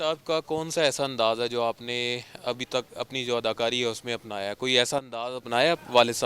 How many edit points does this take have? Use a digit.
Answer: 0